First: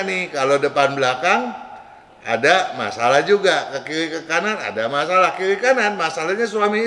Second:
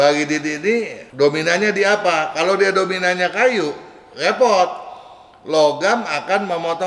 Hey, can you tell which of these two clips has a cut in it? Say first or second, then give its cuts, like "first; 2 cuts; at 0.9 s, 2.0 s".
second; 1 cut; at 1.0 s